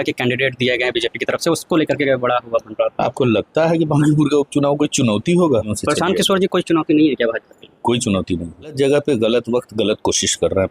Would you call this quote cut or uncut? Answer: cut